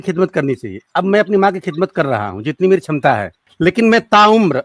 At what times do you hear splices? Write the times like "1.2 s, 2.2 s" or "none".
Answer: 3.4 s